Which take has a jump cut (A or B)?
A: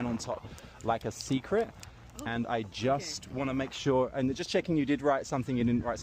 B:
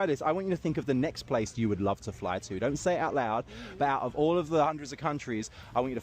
B